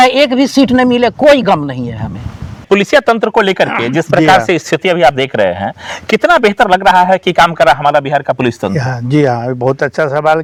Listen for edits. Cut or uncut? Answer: uncut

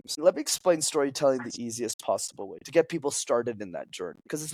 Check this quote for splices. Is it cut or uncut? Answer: uncut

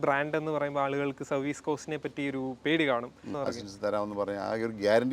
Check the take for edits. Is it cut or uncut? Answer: cut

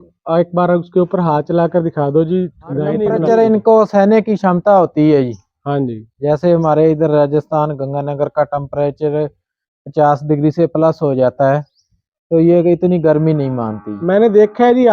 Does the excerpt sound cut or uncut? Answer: cut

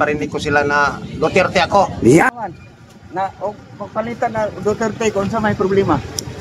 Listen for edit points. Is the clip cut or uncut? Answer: cut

